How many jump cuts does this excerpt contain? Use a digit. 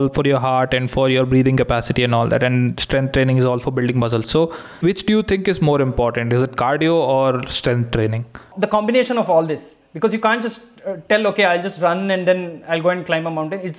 2